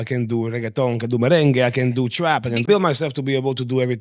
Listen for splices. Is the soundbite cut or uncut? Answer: cut